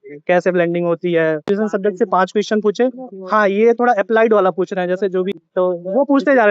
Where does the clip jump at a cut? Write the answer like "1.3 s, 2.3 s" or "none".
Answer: 1.5 s, 5.3 s